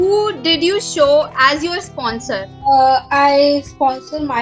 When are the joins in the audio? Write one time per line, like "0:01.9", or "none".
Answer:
0:02.5